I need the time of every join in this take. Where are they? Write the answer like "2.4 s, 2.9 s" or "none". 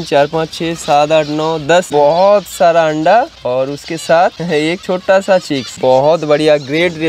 1.9 s